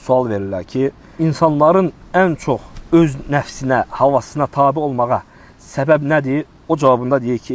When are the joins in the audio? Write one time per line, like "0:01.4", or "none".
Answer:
0:01.0
0:02.7